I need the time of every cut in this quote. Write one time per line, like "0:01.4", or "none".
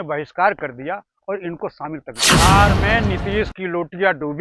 0:02.4